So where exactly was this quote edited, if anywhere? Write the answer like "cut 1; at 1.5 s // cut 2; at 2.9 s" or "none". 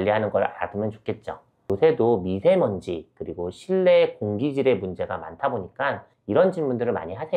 none

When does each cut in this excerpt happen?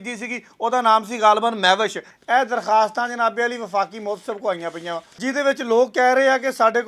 cut 1; at 2.1 s // cut 2; at 5.1 s

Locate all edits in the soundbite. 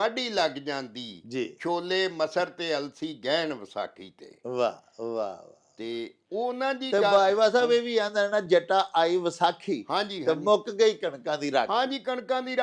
none

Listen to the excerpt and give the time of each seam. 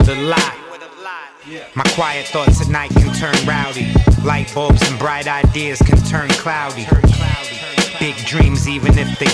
cut 1; at 7.4 s

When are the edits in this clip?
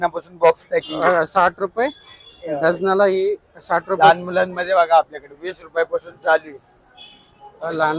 cut 1; at 4.0 s

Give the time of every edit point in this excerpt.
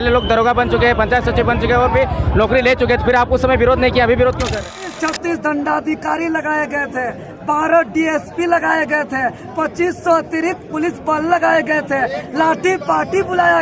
cut 1; at 4.6 s

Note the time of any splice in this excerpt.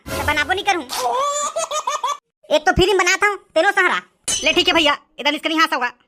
none

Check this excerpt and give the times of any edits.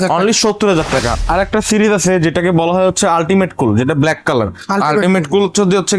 cut 1; at 1.1 s

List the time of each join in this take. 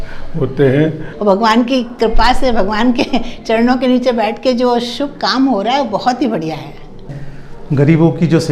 cut 1; at 1.1 s // cut 2; at 7.0 s

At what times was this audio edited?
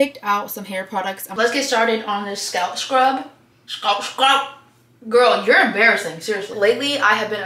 cut 1; at 1.2 s // cut 2; at 6.5 s

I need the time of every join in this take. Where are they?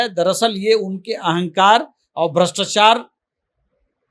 none

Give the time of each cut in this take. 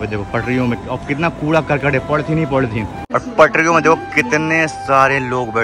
cut 1; at 3.0 s

